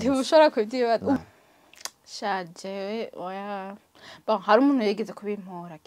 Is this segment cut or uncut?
cut